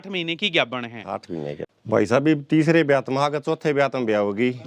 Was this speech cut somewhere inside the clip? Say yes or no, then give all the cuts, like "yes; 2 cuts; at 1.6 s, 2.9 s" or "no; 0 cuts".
yes; 1 cut; at 1.7 s